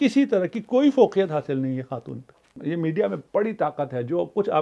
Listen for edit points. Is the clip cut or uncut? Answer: cut